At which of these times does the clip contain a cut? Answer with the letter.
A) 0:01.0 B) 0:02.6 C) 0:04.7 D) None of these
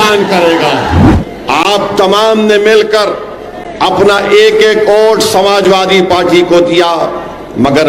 A